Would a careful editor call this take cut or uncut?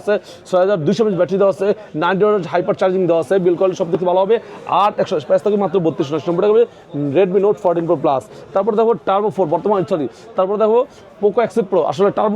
uncut